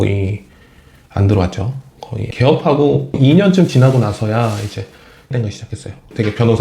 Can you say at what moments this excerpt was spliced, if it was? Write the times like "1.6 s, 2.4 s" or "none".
5.3 s